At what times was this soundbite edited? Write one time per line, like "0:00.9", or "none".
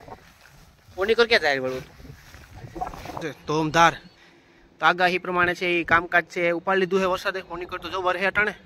0:03.2